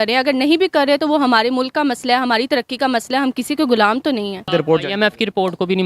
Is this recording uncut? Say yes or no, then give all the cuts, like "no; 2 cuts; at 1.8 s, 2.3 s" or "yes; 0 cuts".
no; 1 cut; at 4.5 s